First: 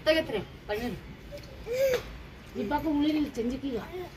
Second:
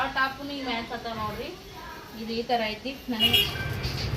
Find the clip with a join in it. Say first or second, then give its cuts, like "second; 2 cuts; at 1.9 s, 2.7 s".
second; 1 cut; at 3.3 s